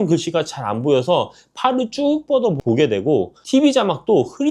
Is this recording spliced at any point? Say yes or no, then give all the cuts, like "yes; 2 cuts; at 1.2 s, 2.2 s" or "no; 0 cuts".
yes; 1 cut; at 3.4 s